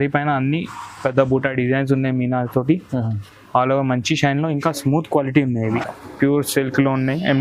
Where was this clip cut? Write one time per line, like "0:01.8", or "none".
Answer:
0:05.8